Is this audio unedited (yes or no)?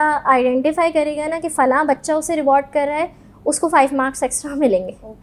yes